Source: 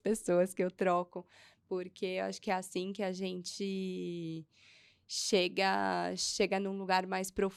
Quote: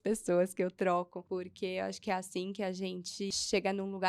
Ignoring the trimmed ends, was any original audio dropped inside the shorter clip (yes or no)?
yes